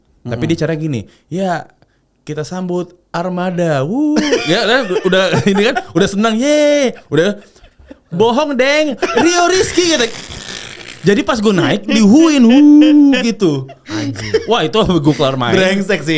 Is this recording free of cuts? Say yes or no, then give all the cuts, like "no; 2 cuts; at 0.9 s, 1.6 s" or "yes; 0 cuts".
yes; 0 cuts